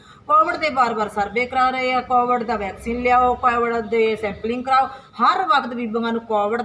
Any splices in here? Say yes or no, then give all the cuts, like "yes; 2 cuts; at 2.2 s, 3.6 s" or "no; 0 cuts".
yes; 1 cut; at 5.0 s